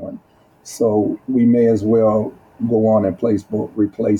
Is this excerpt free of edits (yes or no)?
yes